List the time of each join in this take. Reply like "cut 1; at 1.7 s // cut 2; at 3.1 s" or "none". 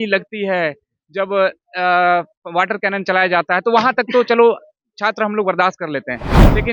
none